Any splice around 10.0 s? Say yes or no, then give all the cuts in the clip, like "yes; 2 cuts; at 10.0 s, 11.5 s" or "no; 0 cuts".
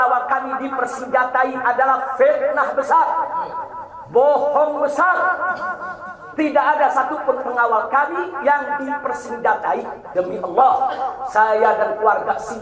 yes; 1 cut; at 10.0 s